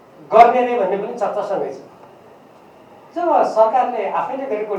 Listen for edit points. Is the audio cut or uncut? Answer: uncut